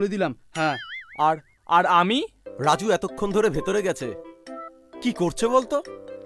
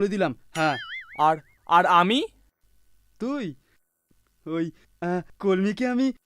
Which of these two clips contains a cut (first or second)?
first